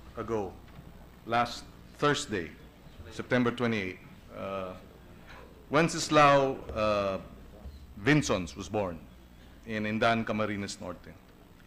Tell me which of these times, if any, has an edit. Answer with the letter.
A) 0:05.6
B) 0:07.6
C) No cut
C